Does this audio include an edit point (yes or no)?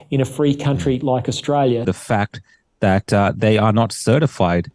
yes